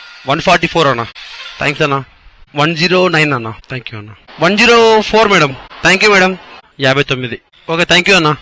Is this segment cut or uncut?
uncut